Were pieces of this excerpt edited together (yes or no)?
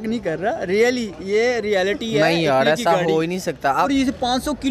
yes